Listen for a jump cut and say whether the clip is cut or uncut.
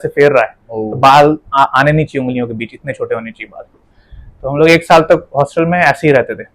uncut